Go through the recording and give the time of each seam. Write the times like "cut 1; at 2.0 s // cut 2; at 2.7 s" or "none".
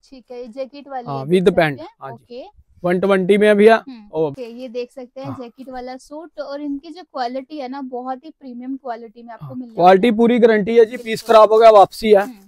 cut 1; at 4.4 s